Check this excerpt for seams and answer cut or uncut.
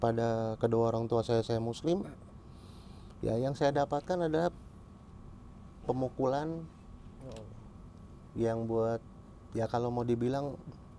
uncut